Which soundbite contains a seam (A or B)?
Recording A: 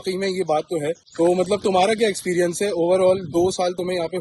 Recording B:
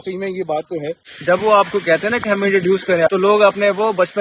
B